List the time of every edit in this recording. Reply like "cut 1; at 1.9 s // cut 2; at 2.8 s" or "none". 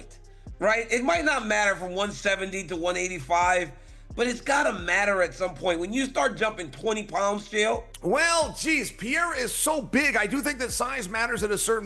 cut 1; at 7.9 s